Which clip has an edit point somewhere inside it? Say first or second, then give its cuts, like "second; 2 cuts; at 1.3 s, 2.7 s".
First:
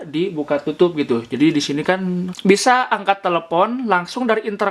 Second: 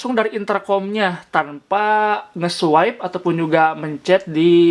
first; 1 cut; at 2.4 s